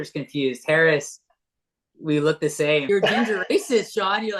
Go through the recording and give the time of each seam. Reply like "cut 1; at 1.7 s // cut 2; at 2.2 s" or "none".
cut 1; at 2.8 s